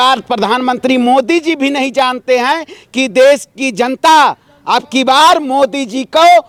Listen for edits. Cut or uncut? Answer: uncut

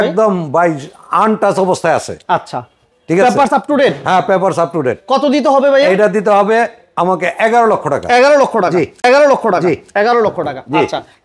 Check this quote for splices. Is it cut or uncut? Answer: uncut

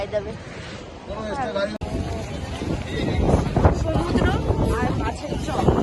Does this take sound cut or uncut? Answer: cut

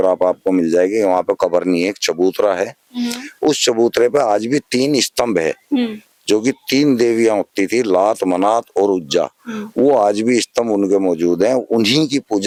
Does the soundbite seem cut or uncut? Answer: uncut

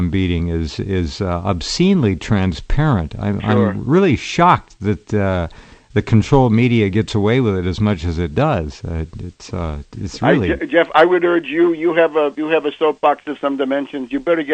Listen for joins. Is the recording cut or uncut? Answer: uncut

